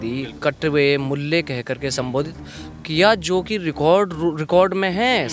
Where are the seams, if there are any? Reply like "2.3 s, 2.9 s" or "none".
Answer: none